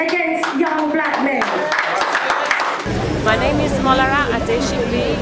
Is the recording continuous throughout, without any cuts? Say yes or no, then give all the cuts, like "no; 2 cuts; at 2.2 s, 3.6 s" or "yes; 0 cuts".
yes; 0 cuts